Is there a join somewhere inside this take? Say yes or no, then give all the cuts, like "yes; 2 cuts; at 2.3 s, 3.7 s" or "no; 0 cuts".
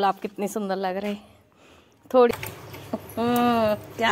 yes; 1 cut; at 2.4 s